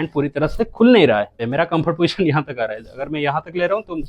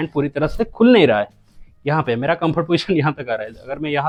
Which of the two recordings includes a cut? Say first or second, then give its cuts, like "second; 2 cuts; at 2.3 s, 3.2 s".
first; 1 cut; at 1.4 s